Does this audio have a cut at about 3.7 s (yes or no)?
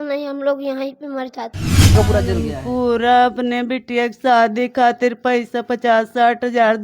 no